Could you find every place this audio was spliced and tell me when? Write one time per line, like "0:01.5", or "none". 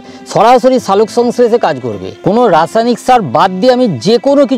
0:02.0